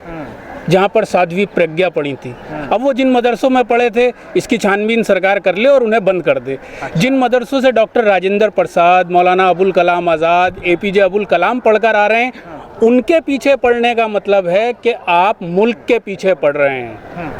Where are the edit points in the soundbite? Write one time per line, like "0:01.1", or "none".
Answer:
none